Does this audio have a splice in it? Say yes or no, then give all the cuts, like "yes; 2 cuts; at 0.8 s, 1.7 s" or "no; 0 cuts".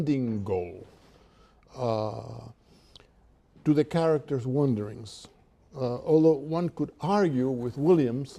yes; 1 cut; at 5.4 s